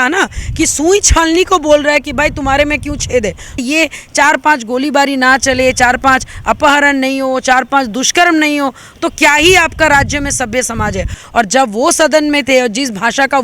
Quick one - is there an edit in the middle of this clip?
yes; 2 cuts; at 3.6 s, 11.2 s

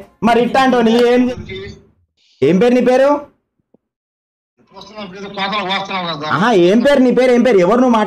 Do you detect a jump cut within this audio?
yes; 1 cut; at 1.3 s

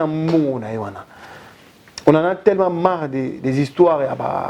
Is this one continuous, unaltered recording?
yes; 0 cuts

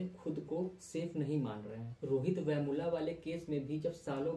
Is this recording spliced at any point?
no; 0 cuts

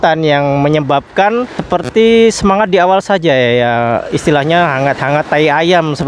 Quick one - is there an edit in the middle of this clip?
yes; 1 cut; at 1.6 s

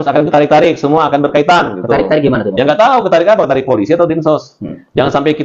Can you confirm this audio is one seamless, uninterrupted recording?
yes; 0 cuts

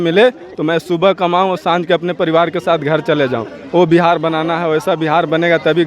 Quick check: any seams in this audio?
no; 0 cuts

